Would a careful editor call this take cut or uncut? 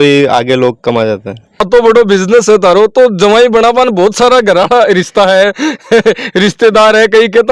cut